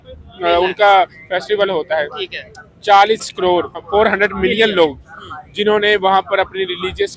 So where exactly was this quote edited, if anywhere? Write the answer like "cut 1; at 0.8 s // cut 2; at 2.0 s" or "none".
cut 1; at 3.3 s

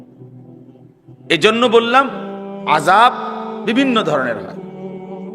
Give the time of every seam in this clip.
cut 1; at 4.4 s

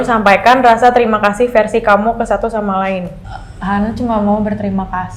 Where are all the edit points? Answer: none

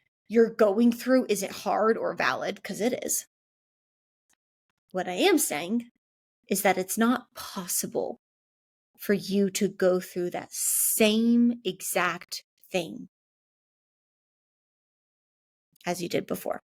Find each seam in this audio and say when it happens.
none

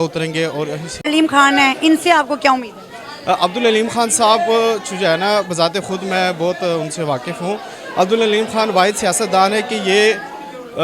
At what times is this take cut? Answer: cut 1; at 1.1 s

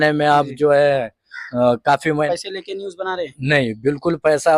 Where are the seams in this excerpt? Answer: cut 1; at 2.3 s

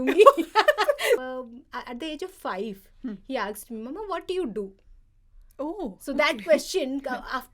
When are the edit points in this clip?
cut 1; at 1.2 s

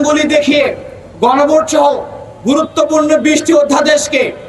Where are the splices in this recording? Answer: none

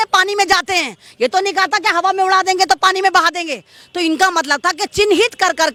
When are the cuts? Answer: none

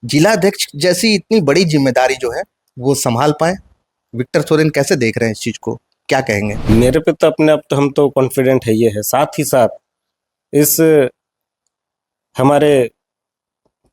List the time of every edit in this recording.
cut 1; at 6.7 s

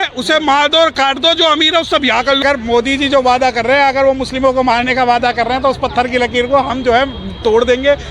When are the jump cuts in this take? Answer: cut 1; at 2.4 s

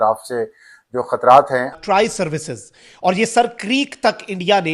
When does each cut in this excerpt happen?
cut 1; at 1.8 s

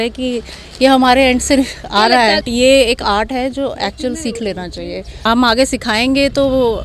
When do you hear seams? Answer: cut 1; at 2.5 s // cut 2; at 5.2 s

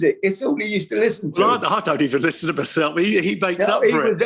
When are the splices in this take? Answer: cut 1; at 1.3 s

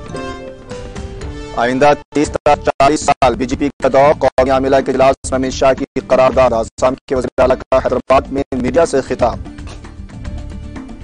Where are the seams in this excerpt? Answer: cut 1; at 1.0 s

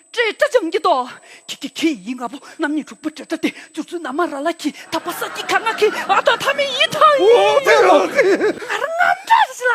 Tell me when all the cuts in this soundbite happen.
cut 1; at 8.7 s

